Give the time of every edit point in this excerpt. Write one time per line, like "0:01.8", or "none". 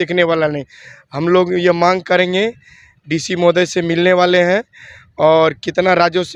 none